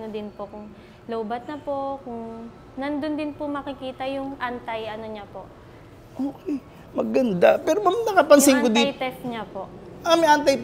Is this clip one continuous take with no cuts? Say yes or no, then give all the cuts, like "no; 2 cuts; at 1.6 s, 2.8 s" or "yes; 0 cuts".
yes; 0 cuts